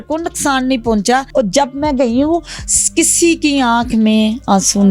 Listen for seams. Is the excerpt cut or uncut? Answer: cut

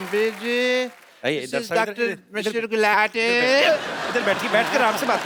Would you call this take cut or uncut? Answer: uncut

